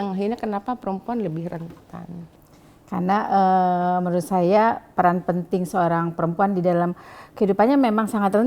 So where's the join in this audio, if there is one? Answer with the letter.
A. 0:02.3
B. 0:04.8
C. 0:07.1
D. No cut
A